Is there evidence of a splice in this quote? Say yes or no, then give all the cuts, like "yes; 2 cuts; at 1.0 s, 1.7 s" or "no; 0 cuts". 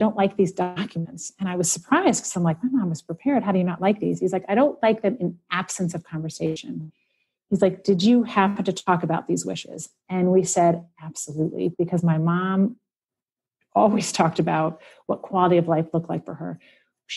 no; 0 cuts